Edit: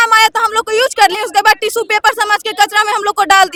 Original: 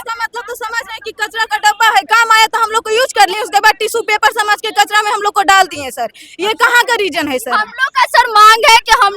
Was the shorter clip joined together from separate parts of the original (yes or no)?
no